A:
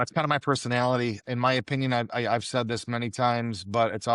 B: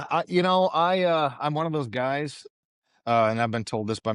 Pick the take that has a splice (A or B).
A